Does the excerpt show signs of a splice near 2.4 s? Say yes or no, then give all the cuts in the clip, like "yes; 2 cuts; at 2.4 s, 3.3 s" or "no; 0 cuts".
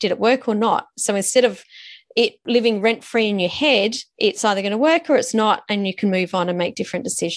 yes; 2 cuts; at 2.4 s, 4.0 s